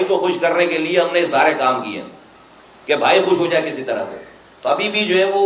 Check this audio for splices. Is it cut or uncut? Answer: uncut